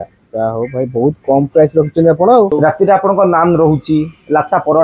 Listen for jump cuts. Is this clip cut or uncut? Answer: cut